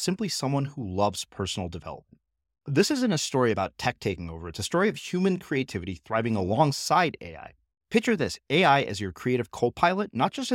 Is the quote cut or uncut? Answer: uncut